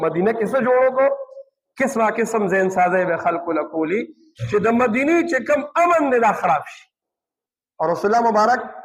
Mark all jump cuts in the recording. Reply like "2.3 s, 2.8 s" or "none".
none